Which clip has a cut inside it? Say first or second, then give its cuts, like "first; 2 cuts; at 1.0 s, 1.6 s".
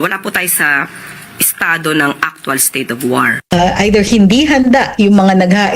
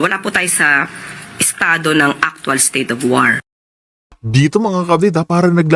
first; 1 cut; at 3.5 s